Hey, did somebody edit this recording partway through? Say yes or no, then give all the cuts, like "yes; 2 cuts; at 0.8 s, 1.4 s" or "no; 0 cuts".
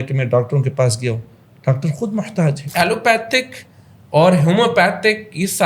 yes; 1 cut; at 2.6 s